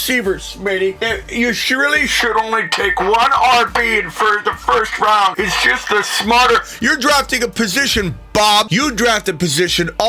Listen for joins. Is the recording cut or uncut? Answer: cut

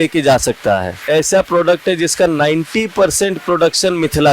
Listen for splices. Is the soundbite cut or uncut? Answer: cut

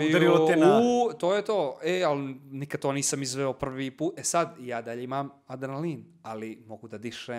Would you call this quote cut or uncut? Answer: uncut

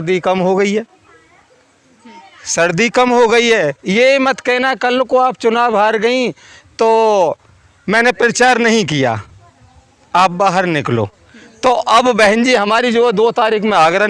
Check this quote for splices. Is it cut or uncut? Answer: uncut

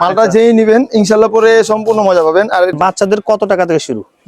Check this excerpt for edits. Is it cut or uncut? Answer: cut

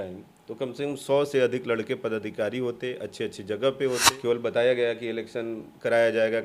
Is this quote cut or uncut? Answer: cut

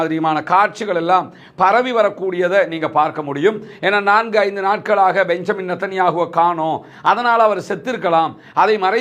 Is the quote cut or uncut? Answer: uncut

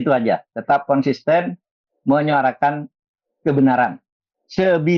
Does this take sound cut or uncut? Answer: uncut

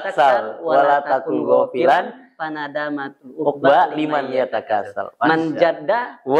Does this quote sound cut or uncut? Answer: uncut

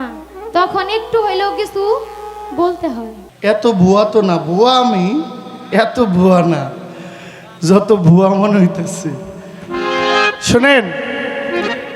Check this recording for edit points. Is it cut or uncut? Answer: cut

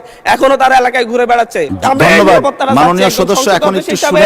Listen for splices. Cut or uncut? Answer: cut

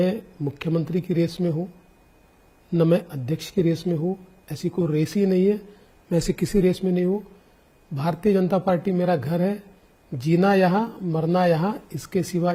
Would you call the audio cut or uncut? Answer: uncut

